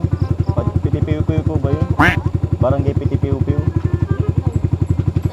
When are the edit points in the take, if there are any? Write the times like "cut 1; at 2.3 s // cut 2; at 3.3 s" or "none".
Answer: cut 1; at 1.6 s

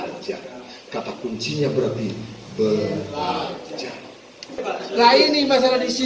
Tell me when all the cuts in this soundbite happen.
cut 1; at 4.6 s

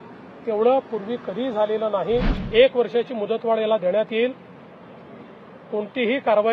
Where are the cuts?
cut 1; at 2.4 s

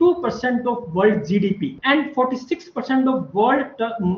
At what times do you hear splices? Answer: cut 1; at 1.7 s

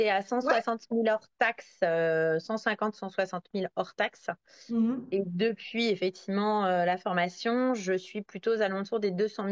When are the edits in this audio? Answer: none

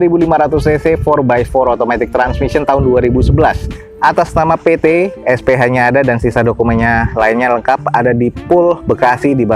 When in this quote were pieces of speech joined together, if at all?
none

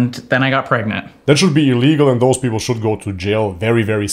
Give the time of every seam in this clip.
cut 1; at 1.1 s

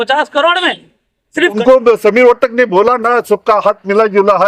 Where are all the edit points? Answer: cut 1; at 1.6 s

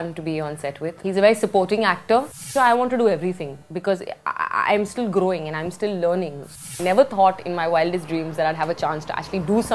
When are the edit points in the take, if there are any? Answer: cut 1; at 1.0 s // cut 2; at 2.4 s // cut 3; at 6.5 s

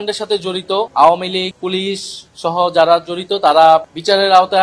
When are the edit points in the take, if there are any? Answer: cut 1; at 0.9 s // cut 2; at 1.5 s

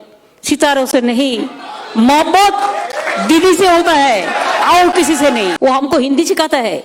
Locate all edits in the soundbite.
cut 1; at 5.5 s

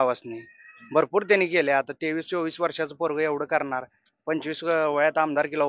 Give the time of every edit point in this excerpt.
none

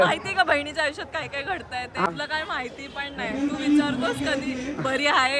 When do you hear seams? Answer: cut 1; at 2.1 s

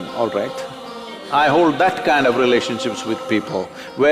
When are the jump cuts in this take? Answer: cut 1; at 1.2 s

